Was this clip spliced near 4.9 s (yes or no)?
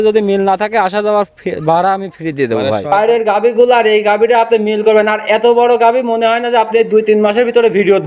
no